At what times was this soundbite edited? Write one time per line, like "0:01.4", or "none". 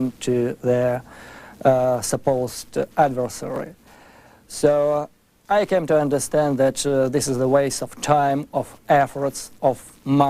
none